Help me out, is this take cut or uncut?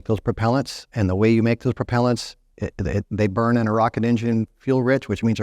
cut